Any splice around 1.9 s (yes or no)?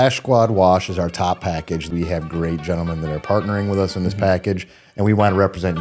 yes